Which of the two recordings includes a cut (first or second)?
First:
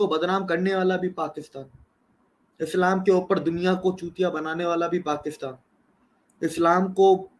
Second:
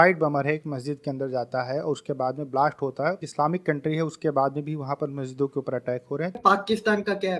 second